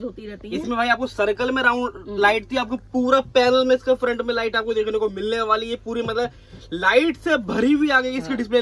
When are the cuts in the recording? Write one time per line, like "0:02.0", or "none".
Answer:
none